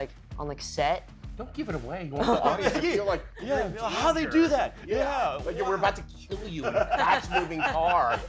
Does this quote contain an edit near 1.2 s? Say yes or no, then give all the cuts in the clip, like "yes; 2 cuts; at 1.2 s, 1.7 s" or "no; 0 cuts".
yes; 1 cut; at 1.2 s